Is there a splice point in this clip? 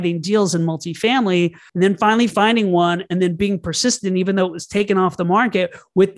yes; 1 cut; at 1.6 s

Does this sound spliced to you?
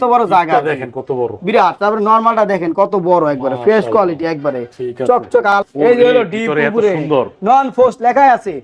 yes; 1 cut; at 5.6 s

